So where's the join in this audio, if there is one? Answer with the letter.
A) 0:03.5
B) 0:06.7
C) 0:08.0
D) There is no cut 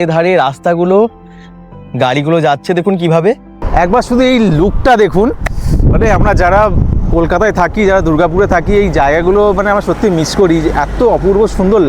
A